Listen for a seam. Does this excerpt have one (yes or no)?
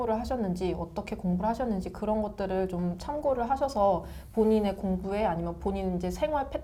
no